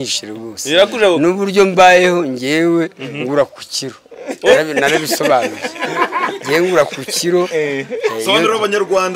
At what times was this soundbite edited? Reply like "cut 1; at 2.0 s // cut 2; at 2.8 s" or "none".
none